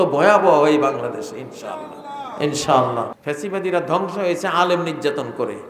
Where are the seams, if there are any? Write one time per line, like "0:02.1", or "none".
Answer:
0:03.1